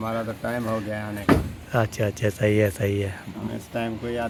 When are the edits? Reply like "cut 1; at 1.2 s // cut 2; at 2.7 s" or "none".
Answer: none